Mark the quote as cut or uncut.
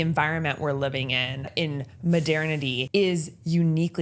cut